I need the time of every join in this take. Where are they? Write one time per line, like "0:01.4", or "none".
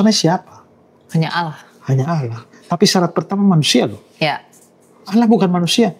none